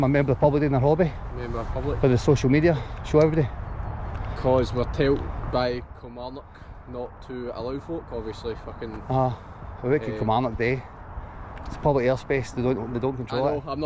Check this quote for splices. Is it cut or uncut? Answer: uncut